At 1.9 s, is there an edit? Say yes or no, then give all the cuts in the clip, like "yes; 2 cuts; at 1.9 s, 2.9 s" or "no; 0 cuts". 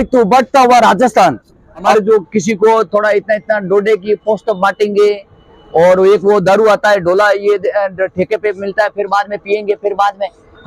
yes; 1 cut; at 1.9 s